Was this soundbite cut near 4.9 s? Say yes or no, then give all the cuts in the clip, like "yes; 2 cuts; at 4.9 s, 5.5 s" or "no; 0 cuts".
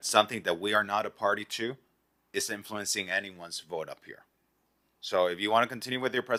no; 0 cuts